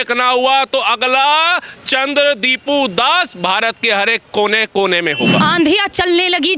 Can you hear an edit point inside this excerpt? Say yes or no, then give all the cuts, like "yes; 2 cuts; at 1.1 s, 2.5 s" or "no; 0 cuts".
yes; 1 cut; at 5.4 s